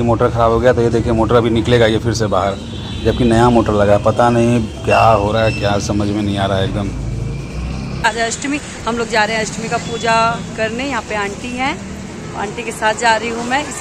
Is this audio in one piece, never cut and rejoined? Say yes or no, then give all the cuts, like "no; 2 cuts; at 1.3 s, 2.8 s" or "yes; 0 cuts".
yes; 0 cuts